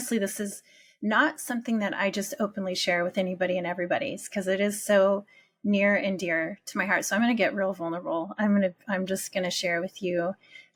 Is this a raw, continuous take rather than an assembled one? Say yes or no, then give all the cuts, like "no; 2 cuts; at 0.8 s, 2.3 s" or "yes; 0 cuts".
yes; 0 cuts